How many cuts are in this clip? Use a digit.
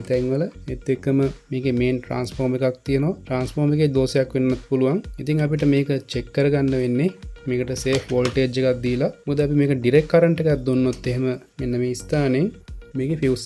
0